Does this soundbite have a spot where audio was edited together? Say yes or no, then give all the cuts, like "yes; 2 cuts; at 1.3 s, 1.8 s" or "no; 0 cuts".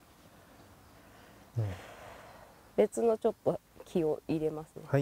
no; 0 cuts